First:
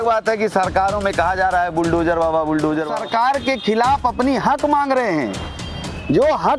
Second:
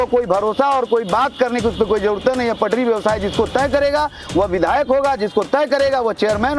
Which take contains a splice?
first; 1 cut; at 2.9 s

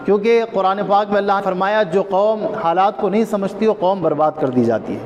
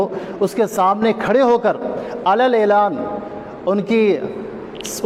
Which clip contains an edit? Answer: first; 1 cut; at 1.4 s

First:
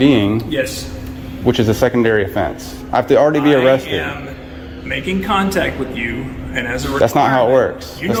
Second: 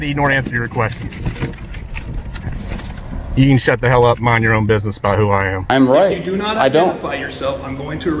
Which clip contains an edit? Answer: second; 1 cut; at 5.6 s

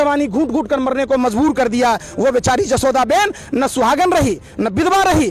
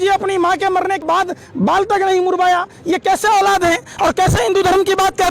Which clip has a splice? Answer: second; 1 cut; at 1.0 s

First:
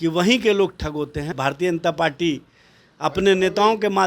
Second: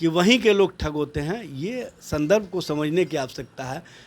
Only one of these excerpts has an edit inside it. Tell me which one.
first; 1 cut; at 1.4 s

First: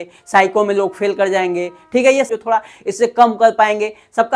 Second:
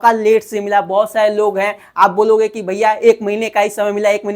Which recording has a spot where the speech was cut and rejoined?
first; 1 cut; at 2.3 s

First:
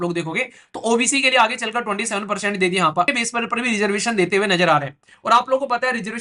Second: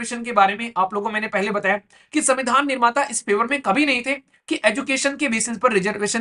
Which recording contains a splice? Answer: first; 1 cut; at 3.1 s

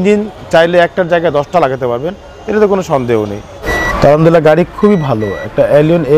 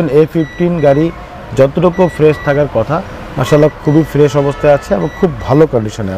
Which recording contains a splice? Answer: first; 1 cut; at 3.6 s

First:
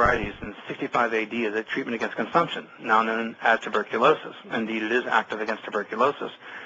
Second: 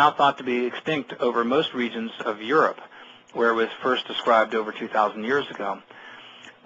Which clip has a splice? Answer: first; 1 cut; at 3.3 s

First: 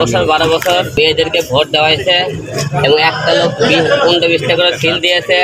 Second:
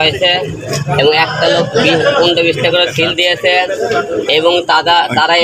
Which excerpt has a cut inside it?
first; 1 cut; at 0.9 s

